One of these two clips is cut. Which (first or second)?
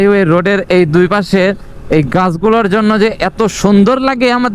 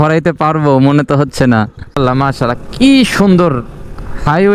second